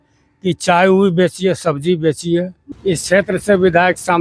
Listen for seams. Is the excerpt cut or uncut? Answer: cut